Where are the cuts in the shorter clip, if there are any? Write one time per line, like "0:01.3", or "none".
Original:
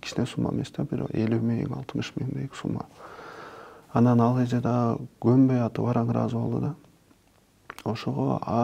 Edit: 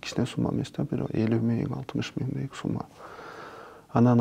none